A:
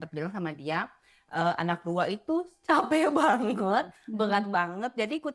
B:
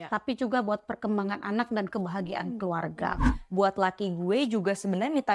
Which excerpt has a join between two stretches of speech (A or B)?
B